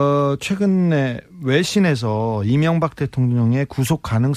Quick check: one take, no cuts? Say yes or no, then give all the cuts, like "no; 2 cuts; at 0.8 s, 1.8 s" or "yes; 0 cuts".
yes; 0 cuts